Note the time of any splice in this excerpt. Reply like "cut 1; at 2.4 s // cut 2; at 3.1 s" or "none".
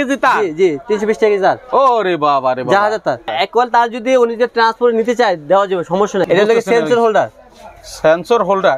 cut 1; at 3.3 s // cut 2; at 6.2 s